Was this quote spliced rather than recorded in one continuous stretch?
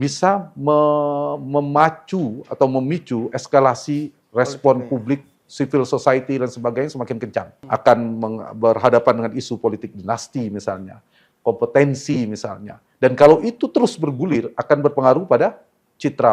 yes; 1 cut; at 7.6 s

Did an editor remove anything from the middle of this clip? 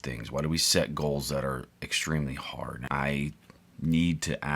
yes; 1 cut; at 2.7 s

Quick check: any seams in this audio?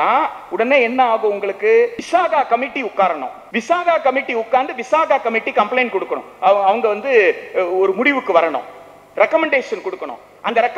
yes; 2 cuts; at 2.0 s, 3.4 s

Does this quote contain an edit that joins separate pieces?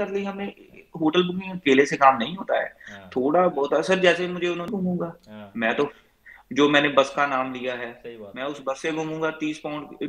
yes; 1 cut; at 4.7 s

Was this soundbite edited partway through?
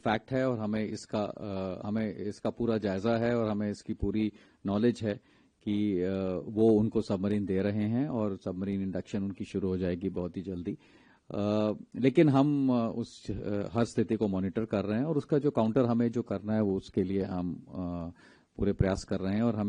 no; 0 cuts

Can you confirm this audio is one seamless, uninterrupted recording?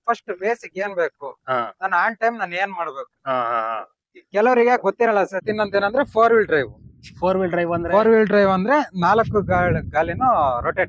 no; 1 cut; at 5.5 s

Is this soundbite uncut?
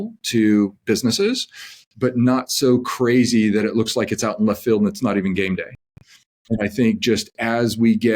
yes; 0 cuts

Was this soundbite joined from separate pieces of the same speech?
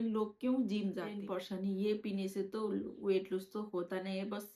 yes; 1 cut; at 1.2 s

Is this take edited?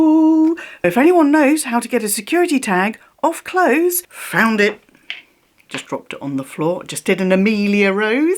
yes; 2 cuts; at 0.8 s, 4.1 s

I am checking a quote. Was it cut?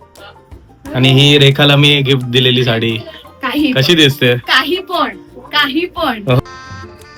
no; 0 cuts

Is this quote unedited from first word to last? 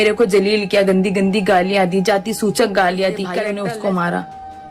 no; 1 cut; at 3.5 s

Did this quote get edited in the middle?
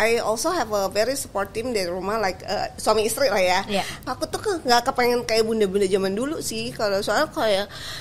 yes; 1 cut; at 4.1 s

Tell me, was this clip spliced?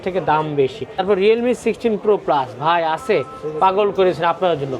yes; 1 cut; at 1.0 s

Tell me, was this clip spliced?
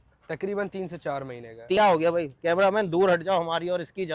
yes; 1 cut; at 1.8 s

